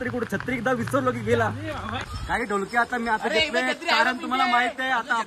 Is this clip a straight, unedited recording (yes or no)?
no